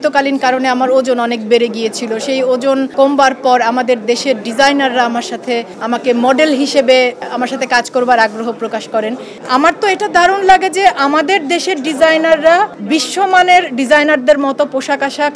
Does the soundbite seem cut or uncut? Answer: cut